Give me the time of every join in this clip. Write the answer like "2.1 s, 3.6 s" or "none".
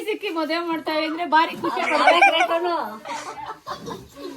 none